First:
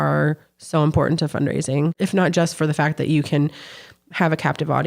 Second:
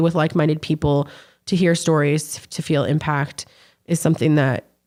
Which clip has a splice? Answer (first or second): first